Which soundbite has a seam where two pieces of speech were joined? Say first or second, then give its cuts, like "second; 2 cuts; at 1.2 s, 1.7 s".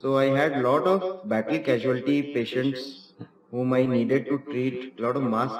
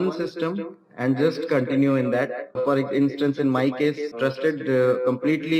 second; 2 cuts; at 2.6 s, 4.1 s